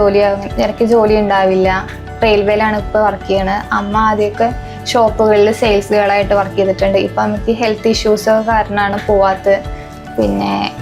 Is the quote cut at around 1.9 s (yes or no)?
no